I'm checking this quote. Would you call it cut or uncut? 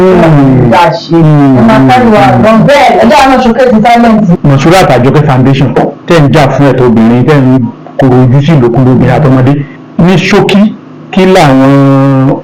cut